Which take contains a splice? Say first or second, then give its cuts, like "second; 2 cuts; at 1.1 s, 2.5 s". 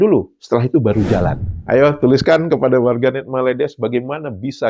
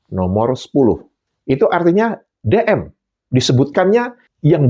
first; 1 cut; at 1.4 s